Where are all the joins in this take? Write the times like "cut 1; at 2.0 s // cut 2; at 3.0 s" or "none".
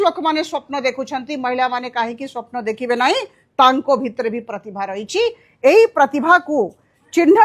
none